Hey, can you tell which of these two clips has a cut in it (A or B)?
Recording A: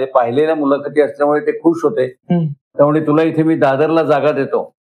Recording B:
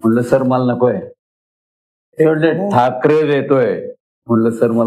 A